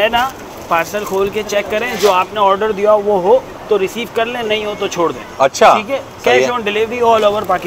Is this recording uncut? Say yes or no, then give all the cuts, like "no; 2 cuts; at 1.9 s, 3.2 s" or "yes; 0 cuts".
yes; 0 cuts